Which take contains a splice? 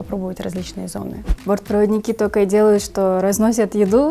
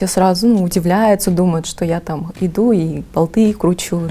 first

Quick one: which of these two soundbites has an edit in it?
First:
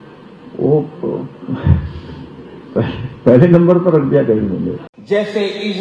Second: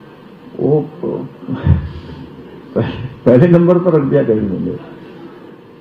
first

